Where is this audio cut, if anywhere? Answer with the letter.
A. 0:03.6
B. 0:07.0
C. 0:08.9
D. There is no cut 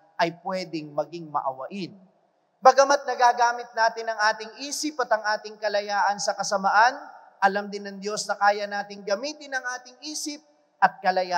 D